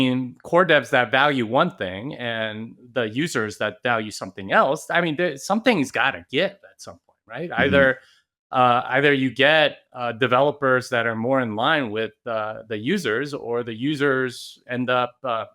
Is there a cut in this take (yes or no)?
no